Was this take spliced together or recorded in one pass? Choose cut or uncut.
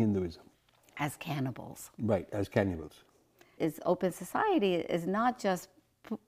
cut